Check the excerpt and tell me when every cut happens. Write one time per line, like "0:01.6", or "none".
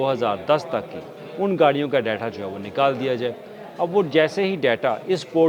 none